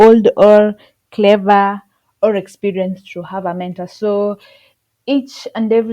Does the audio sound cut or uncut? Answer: uncut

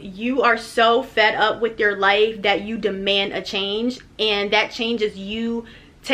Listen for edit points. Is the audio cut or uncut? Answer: uncut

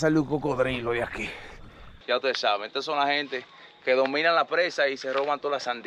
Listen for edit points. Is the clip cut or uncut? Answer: cut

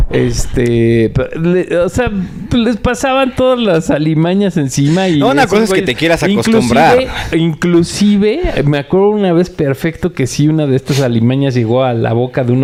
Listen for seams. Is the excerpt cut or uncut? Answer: uncut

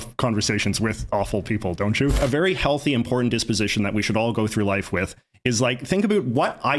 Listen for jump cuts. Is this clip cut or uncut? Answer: cut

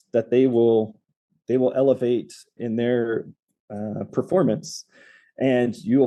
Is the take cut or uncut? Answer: uncut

